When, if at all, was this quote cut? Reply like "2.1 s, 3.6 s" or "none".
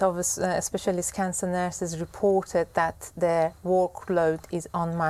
none